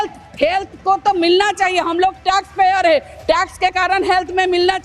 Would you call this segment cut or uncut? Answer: uncut